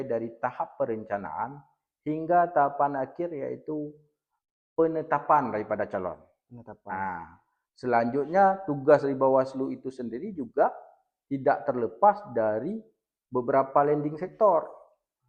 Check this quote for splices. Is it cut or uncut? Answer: uncut